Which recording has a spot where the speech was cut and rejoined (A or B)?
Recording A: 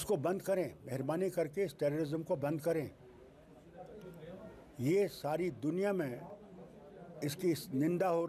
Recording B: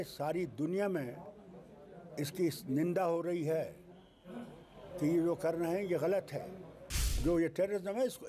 B